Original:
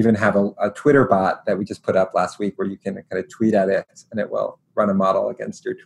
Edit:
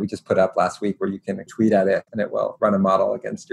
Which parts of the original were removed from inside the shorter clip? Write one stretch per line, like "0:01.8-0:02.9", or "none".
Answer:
0:03.0-0:03.3
0:04.2-0:04.5